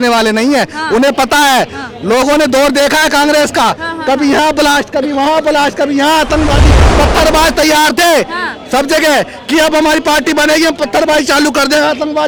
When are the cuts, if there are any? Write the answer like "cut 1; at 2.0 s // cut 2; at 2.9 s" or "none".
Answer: none